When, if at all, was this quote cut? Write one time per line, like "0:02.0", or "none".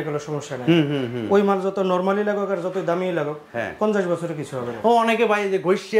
none